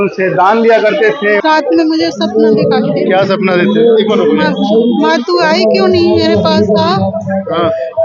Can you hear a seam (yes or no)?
yes